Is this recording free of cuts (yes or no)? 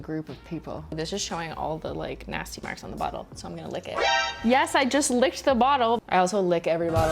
no